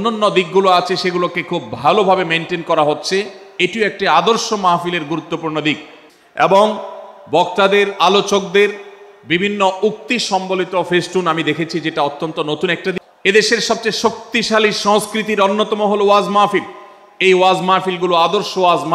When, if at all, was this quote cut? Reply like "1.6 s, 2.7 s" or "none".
5.9 s, 13.0 s